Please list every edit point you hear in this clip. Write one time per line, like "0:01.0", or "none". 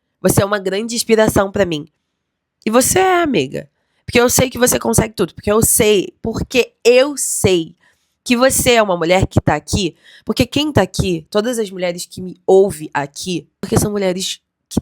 0:13.6